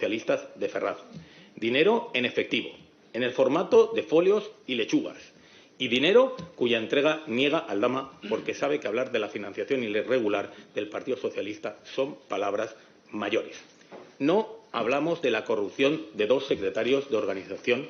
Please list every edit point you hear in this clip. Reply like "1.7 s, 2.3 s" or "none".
none

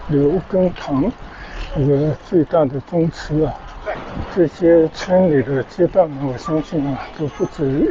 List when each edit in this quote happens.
4.0 s

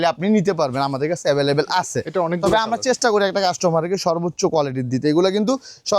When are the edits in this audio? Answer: none

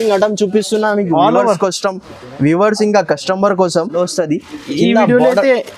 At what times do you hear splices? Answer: 3.9 s

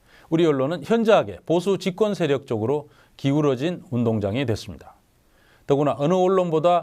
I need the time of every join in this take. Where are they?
1.0 s

